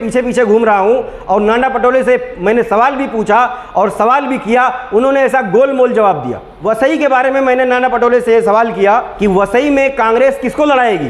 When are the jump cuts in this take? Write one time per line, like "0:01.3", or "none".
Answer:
0:06.5
0:09.1